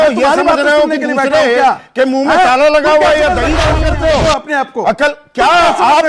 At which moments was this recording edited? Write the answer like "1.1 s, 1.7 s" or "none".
3.7 s